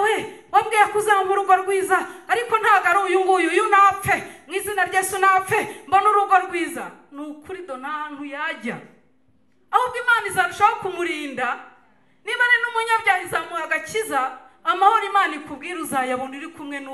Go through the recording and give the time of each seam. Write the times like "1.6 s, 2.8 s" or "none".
none